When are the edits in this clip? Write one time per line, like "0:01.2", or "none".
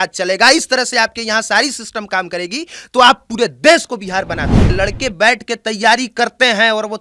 0:04.6